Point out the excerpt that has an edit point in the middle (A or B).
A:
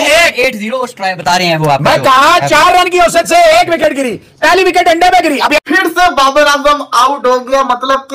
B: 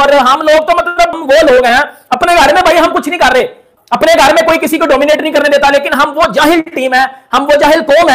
A